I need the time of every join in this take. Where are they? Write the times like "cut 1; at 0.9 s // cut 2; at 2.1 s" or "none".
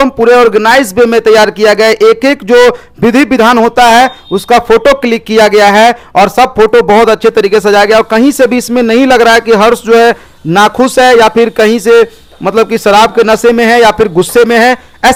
none